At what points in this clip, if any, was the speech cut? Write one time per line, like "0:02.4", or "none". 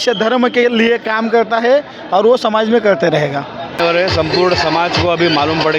0:03.8